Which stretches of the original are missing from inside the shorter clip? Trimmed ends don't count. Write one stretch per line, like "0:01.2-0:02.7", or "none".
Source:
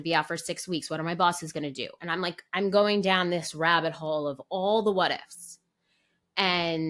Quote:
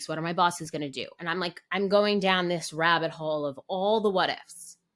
none